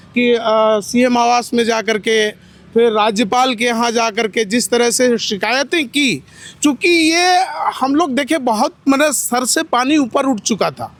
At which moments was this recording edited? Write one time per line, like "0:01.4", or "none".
none